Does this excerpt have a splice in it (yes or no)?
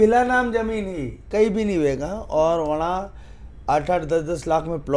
yes